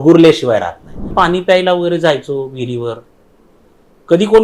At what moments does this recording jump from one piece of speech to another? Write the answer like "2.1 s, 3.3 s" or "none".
1.1 s